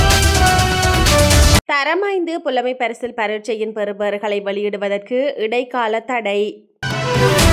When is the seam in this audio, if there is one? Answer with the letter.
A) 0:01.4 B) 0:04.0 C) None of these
C